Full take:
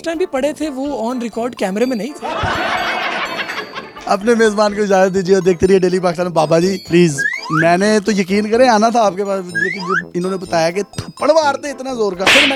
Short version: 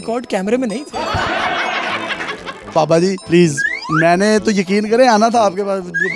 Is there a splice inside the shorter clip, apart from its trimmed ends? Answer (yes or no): yes